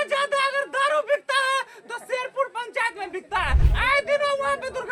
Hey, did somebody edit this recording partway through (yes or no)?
yes